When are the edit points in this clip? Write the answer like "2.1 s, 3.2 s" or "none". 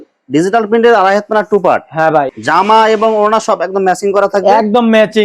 2.3 s